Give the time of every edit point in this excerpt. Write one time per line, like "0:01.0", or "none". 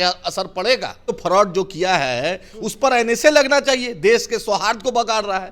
0:01.0